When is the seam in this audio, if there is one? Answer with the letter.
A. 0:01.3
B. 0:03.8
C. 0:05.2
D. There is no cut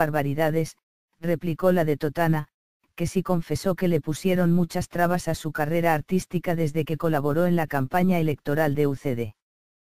B